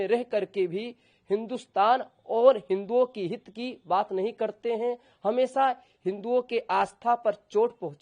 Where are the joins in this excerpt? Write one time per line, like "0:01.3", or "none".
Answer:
none